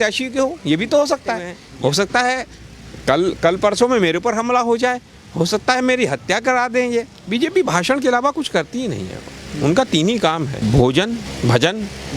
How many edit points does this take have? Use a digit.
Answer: 4